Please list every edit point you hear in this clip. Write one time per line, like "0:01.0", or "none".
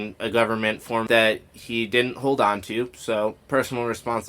0:01.0